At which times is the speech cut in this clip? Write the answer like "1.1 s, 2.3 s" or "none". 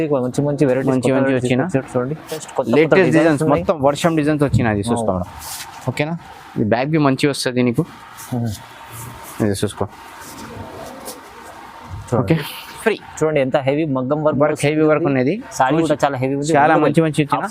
2.5 s, 12.8 s

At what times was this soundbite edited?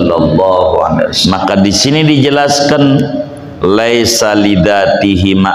1.2 s

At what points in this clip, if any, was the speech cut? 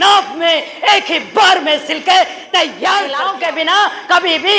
3.3 s

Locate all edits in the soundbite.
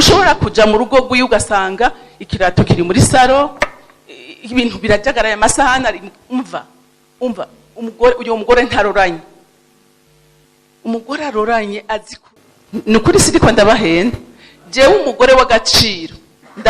12.2 s

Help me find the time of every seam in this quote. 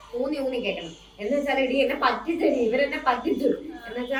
none

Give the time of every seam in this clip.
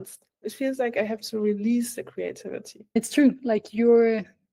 3.0 s

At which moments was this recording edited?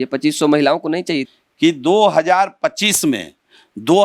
1.3 s

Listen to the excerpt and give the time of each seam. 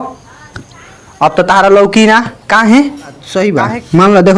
3.2 s

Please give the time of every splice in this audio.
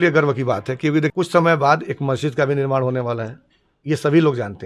1.1 s

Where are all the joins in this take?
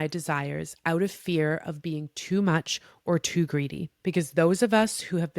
3.8 s

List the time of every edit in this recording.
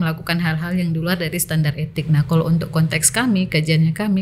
none

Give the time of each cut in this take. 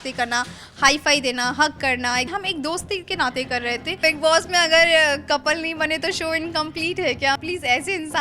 2.3 s, 4.0 s, 7.4 s

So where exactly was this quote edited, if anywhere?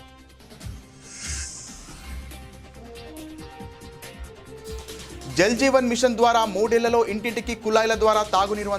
none

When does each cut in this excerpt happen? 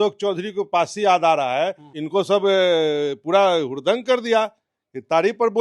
1.9 s

